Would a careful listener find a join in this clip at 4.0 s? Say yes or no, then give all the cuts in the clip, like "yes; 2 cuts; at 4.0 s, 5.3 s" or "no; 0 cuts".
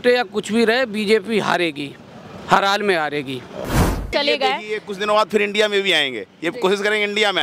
yes; 1 cut; at 4.0 s